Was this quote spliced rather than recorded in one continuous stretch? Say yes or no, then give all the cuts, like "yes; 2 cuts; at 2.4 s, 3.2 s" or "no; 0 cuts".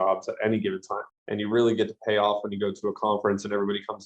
yes; 1 cut; at 1.0 s